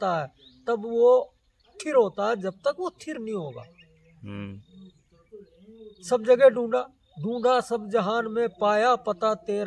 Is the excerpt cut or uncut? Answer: uncut